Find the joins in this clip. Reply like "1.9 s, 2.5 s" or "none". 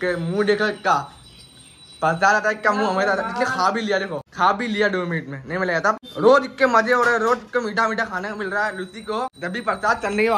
none